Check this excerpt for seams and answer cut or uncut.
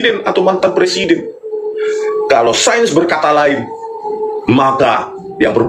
uncut